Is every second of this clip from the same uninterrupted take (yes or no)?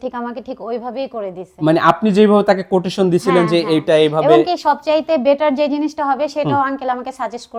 yes